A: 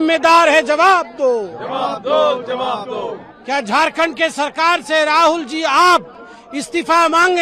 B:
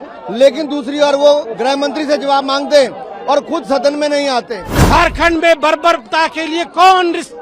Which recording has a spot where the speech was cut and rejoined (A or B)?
B